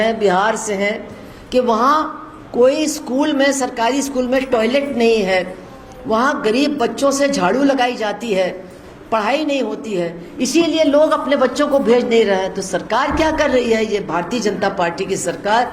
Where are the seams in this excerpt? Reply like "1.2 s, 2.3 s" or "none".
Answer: none